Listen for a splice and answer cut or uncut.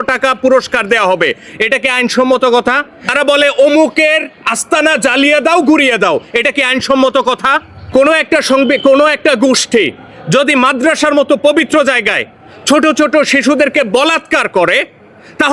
cut